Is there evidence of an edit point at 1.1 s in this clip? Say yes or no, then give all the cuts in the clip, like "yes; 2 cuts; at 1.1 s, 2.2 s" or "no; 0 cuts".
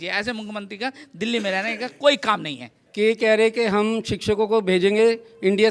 no; 1 cut; at 2.8 s